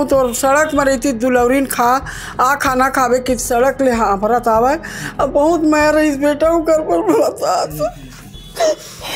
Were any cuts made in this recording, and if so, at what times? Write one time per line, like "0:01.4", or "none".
none